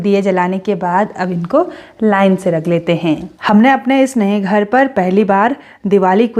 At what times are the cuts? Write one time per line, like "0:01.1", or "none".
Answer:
0:03.3